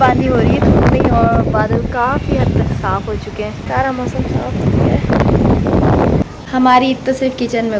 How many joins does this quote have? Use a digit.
2